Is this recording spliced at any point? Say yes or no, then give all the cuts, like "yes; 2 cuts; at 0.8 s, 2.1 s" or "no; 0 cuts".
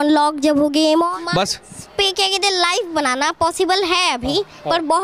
yes; 1 cut; at 1.1 s